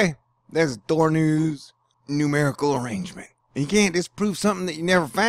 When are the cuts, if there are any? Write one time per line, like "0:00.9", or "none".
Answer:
0:03.4